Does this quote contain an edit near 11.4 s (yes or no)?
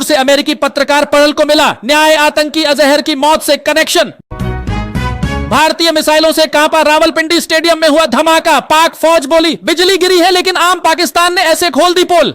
yes